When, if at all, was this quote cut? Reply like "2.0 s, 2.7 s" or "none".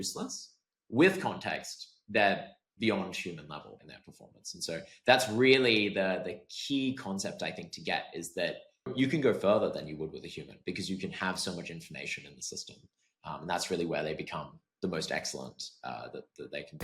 3.8 s, 8.9 s